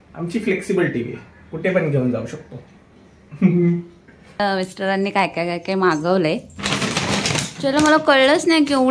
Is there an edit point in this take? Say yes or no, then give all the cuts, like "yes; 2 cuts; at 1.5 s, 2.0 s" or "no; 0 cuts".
yes; 1 cut; at 4.4 s